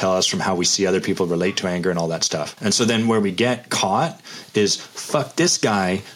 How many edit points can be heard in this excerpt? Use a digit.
1